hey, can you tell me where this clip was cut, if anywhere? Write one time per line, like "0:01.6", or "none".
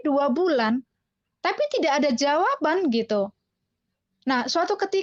none